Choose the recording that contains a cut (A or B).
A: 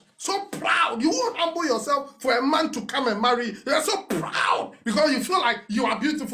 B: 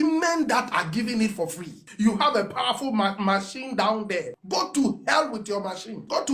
B